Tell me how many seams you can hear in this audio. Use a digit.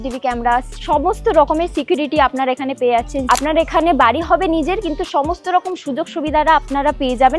1